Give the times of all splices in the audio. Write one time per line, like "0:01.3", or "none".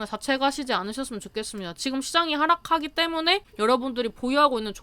0:03.5